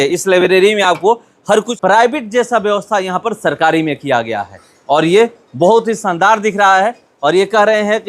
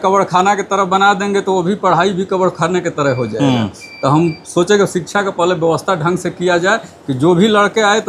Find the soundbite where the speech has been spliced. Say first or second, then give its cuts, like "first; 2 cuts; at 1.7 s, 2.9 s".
first; 1 cut; at 1.7 s